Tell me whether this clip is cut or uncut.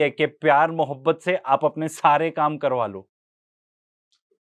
uncut